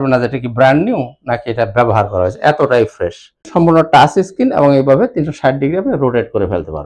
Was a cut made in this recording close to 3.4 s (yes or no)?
yes